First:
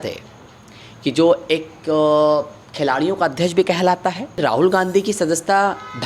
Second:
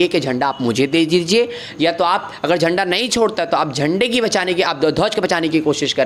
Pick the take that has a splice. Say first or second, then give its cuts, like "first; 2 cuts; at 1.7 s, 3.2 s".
first; 1 cut; at 4.4 s